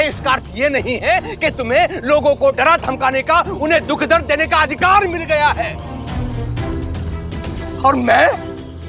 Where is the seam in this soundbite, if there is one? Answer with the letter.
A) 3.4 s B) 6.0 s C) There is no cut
B